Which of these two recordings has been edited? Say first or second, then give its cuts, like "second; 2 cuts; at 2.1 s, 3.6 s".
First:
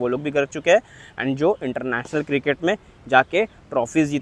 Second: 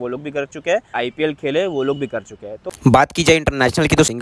second; 2 cuts; at 1.0 s, 2.7 s